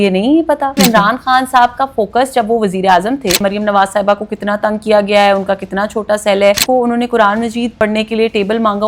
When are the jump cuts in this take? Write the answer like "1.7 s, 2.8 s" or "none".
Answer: 0.8 s, 3.4 s, 6.6 s, 7.7 s